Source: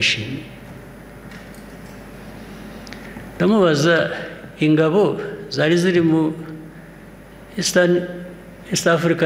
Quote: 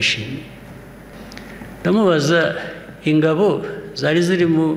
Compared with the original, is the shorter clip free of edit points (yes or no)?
no